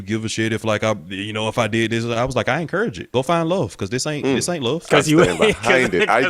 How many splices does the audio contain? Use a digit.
1